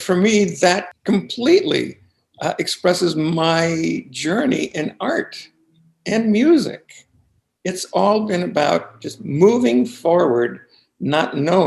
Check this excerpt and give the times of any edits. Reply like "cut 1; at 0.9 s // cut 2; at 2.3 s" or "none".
cut 1; at 0.9 s